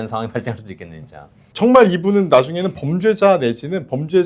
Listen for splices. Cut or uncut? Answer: cut